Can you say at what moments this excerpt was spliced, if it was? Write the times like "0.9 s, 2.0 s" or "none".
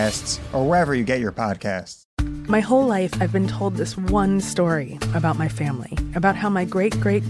1.7 s